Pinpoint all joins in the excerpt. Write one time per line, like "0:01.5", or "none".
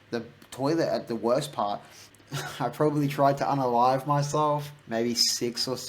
0:01.9
0:04.8